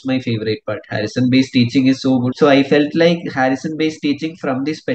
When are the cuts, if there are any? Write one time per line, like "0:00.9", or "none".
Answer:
0:02.3